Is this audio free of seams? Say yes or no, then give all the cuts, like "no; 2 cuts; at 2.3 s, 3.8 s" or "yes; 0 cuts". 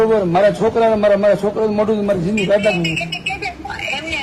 yes; 0 cuts